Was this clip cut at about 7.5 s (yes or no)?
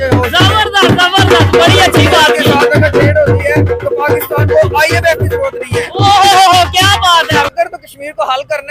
yes